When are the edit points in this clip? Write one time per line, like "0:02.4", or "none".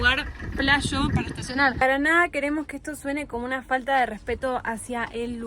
0:01.8

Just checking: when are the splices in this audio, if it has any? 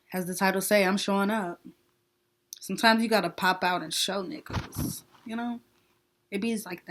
none

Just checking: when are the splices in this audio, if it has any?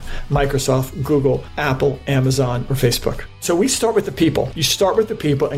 0:01.5
0:03.3
0:04.5

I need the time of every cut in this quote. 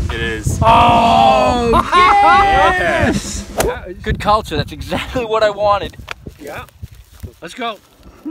0:03.7

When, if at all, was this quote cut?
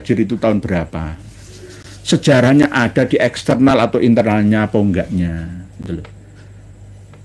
none

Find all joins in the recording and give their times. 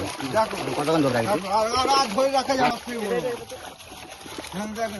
0:02.7

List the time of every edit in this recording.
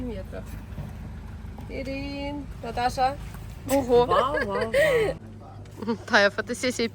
0:05.3

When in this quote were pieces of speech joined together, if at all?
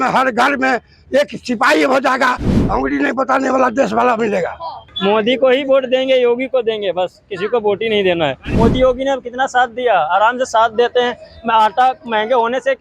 0:04.8
0:08.4

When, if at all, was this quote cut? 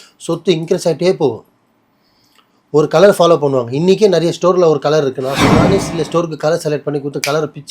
0:05.7

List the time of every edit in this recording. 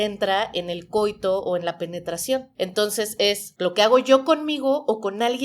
0:02.5
0:03.5

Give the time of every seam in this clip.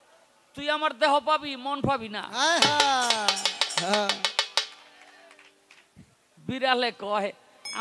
none

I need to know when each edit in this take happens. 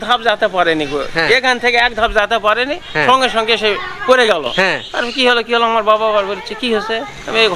none

